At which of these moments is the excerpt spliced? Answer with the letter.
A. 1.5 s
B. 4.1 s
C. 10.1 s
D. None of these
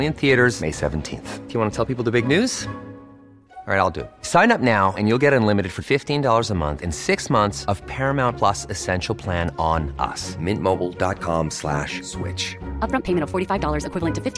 D